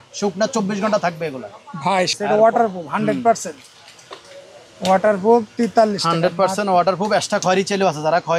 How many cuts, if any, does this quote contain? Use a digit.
1